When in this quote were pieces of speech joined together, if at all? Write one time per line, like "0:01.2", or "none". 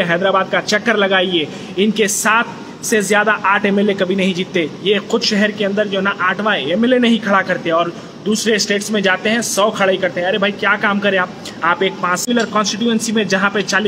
0:12.2

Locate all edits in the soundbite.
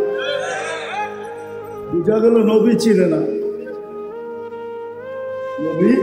0:03.8
0:05.0

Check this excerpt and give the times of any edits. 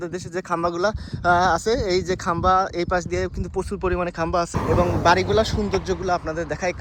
0:04.5

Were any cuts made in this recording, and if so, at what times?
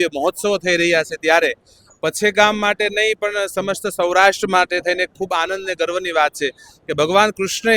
none

